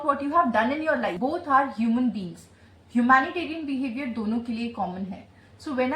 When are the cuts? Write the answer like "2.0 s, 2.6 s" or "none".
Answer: 1.1 s